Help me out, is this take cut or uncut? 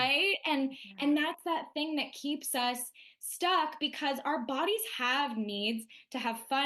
uncut